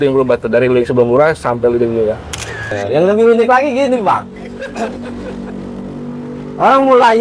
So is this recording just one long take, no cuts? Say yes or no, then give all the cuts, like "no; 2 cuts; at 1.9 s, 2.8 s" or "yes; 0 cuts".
no; 1 cut; at 2.8 s